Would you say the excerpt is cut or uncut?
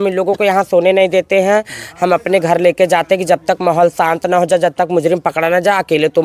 uncut